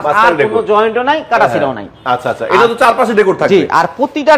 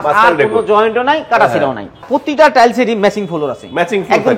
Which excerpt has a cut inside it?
second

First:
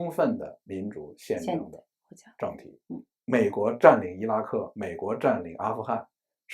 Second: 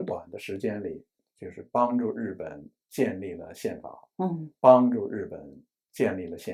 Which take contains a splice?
first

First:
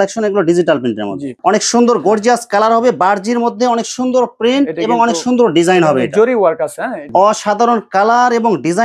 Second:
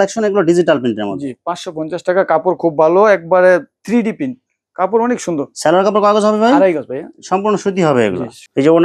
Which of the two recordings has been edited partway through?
first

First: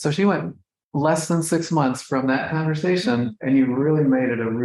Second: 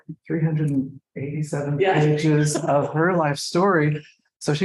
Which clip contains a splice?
first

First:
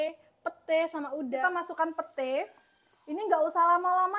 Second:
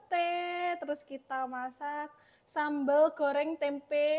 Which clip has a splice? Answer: first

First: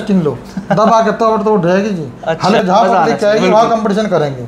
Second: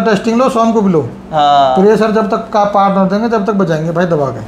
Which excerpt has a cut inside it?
first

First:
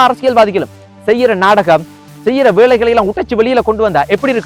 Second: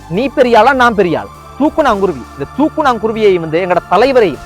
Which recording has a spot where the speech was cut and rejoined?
second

